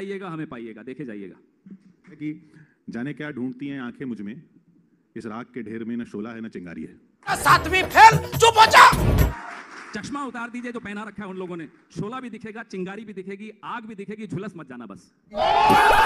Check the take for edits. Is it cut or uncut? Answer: uncut